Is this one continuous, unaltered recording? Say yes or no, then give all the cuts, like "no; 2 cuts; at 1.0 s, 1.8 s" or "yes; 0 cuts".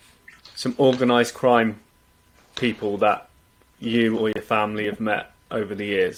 yes; 0 cuts